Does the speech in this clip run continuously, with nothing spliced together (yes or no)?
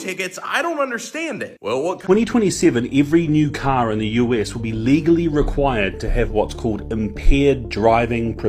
no